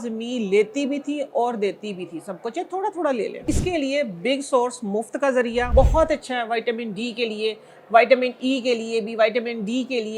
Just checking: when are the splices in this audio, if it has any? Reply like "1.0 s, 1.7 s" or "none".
3.4 s, 5.7 s